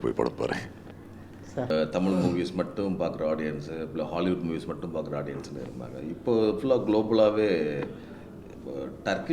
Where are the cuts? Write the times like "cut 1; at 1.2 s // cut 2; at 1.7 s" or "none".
cut 1; at 1.7 s